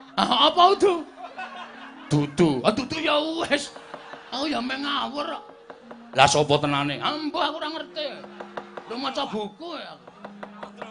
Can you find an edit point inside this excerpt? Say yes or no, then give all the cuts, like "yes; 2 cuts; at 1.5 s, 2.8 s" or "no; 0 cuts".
no; 0 cuts